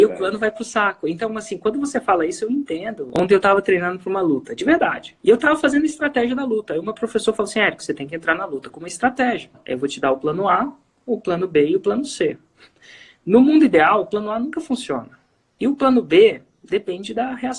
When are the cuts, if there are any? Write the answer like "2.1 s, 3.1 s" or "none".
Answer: 3.2 s, 5.1 s, 9.6 s